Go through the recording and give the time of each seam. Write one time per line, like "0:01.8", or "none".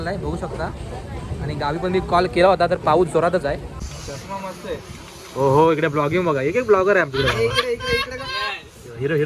0:03.8